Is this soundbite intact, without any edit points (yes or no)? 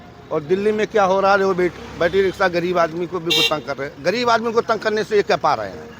yes